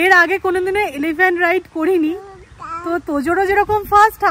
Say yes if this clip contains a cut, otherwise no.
no